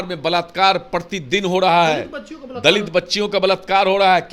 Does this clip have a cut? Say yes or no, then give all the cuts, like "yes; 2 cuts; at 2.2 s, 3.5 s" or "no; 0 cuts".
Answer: no; 0 cuts